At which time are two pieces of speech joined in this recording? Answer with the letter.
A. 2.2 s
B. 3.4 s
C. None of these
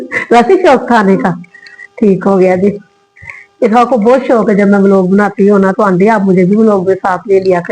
C